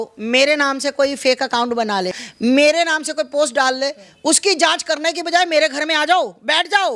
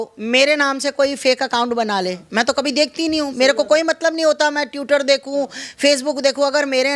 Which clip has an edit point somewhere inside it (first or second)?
first